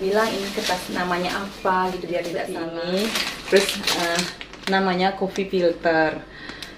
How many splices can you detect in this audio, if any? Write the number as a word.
one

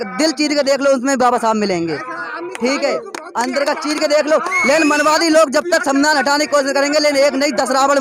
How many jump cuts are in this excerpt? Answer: zero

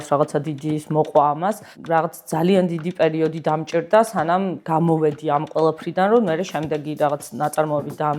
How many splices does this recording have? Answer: one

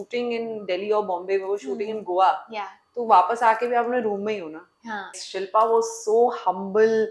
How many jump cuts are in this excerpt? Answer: one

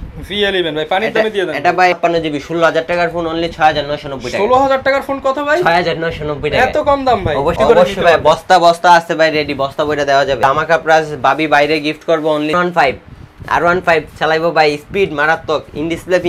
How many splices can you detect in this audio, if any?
four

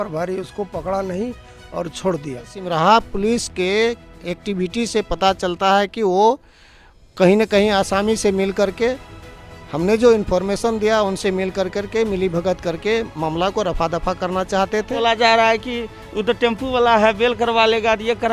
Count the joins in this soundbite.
two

